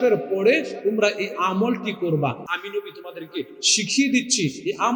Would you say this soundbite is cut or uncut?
cut